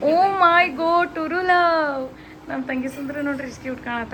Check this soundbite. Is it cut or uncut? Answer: uncut